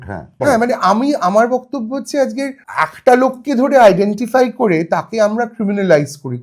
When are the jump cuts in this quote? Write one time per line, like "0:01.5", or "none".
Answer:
0:02.6